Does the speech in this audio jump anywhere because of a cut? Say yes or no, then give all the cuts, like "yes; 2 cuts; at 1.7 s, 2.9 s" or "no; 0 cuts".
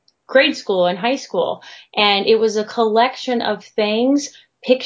no; 0 cuts